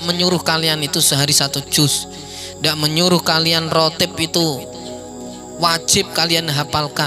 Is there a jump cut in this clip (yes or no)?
no